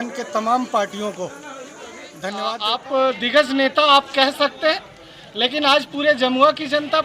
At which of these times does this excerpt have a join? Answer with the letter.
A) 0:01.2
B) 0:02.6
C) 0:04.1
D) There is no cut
B